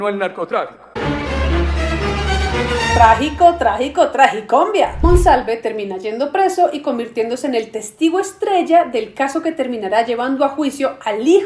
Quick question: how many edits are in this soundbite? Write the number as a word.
one